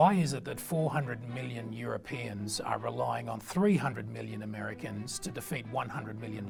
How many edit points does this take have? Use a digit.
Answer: 0